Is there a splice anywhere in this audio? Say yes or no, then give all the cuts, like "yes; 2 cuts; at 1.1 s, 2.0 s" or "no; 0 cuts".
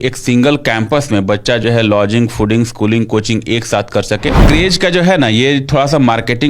yes; 1 cut; at 4.4 s